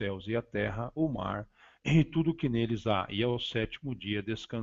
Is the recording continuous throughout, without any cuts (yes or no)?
yes